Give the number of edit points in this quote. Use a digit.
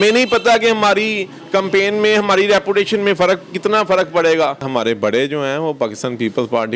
1